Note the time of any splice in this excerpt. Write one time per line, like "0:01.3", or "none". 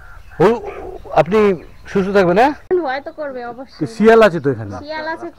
0:02.6